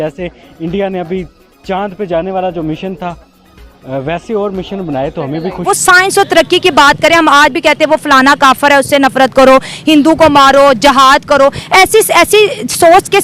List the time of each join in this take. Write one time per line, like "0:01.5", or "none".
0:05.6